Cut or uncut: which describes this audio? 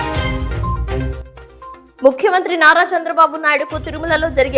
uncut